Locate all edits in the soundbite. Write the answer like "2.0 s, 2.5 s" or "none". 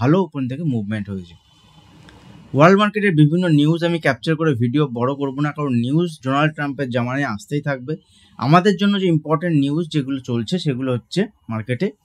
none